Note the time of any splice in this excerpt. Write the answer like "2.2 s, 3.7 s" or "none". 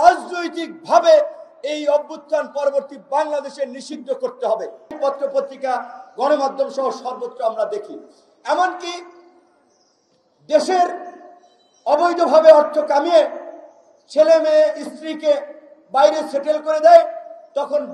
5.0 s